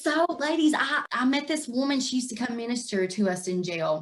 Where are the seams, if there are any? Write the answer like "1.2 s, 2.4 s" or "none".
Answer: 1.0 s